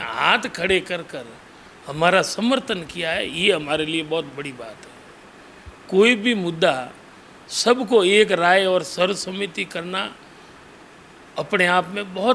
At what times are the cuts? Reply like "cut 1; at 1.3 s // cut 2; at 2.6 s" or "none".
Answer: none